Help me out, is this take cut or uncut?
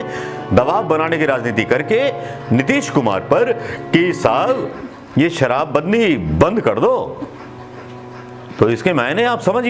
uncut